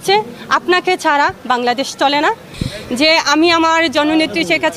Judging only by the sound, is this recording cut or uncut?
cut